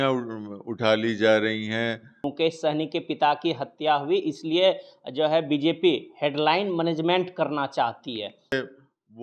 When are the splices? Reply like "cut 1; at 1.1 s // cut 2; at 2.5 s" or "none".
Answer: cut 1; at 2.2 s // cut 2; at 8.5 s